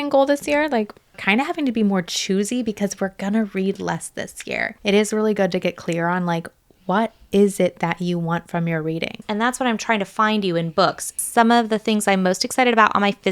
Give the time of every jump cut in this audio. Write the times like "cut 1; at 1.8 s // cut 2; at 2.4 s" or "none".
cut 1; at 1.2 s // cut 2; at 4.6 s // cut 3; at 9.2 s // cut 4; at 11.2 s

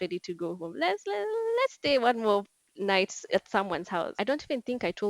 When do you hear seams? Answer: cut 1; at 4.2 s

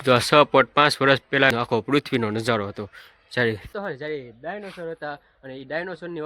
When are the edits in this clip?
cut 1; at 3.7 s

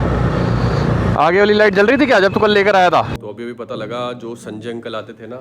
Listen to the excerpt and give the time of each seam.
cut 1; at 3.1 s

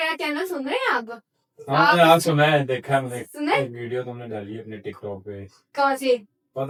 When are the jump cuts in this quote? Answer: none

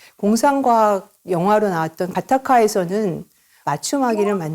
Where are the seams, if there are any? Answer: cut 1; at 2.1 s // cut 2; at 3.6 s

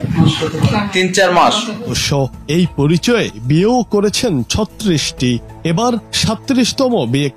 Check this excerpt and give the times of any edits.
cut 1; at 2.0 s

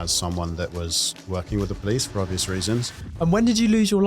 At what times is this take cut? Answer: cut 1; at 3.0 s

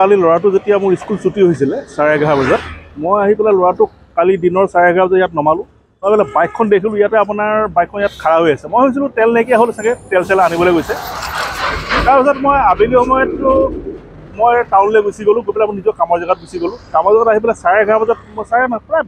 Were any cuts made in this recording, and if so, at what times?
none

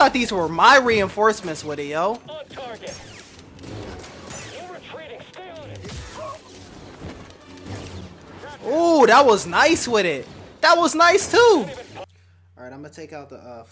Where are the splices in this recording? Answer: cut 1; at 12.1 s

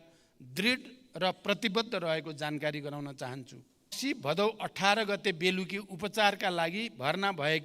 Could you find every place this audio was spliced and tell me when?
cut 1; at 4.0 s

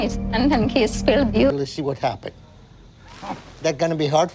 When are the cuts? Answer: cut 1; at 1.5 s

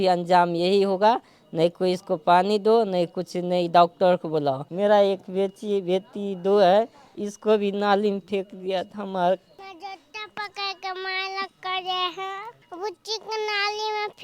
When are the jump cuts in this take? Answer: cut 1; at 4.7 s // cut 2; at 12.6 s

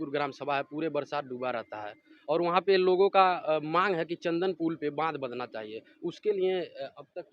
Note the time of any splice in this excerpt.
none

